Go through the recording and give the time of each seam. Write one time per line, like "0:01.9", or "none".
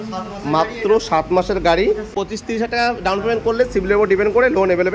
0:02.1